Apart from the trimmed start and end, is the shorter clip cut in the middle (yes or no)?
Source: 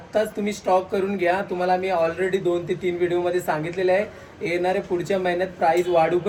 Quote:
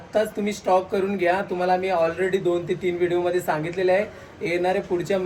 no